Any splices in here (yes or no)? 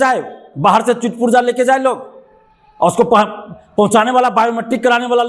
no